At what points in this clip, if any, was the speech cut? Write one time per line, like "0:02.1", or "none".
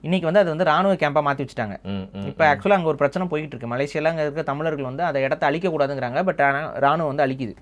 none